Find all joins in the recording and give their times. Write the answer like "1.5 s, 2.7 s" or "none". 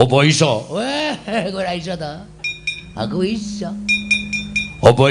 1.0 s

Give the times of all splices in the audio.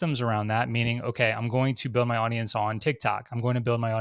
none

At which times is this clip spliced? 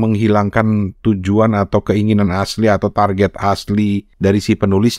4.1 s

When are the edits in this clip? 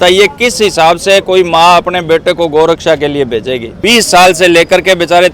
3.7 s

